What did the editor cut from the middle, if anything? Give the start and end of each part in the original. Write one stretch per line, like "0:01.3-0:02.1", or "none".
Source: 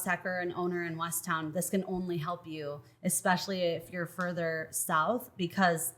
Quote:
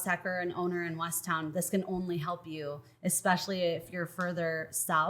none